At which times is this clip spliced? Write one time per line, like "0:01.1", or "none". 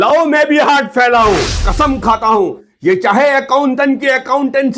0:01.6